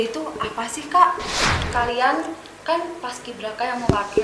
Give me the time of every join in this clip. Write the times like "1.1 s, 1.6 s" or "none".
1.6 s